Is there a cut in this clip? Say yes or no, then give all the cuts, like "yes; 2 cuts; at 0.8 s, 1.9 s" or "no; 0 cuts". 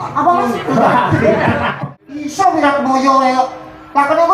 yes; 1 cut; at 1.8 s